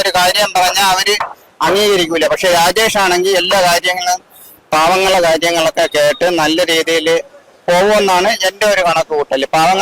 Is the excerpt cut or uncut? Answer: uncut